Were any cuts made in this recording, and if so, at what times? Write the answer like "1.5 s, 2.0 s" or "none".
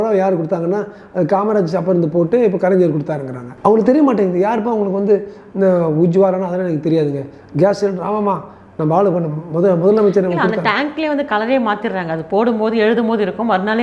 none